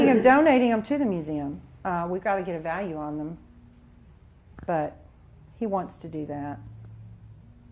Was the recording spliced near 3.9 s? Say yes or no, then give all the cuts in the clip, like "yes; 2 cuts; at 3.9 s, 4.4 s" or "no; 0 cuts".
yes; 1 cut; at 3.9 s